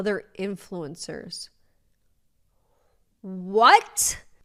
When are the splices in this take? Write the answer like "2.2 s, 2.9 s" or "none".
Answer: none